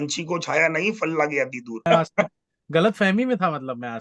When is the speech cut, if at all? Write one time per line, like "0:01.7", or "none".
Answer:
0:01.8